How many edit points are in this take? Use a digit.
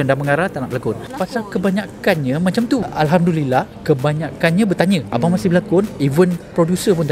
3